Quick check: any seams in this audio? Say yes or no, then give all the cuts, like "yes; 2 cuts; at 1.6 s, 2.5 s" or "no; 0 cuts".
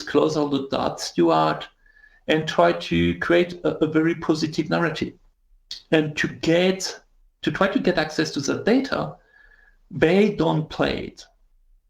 no; 0 cuts